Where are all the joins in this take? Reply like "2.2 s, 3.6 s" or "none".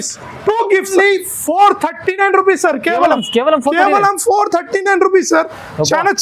0.9 s